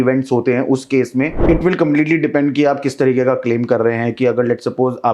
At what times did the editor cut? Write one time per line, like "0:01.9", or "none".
0:01.4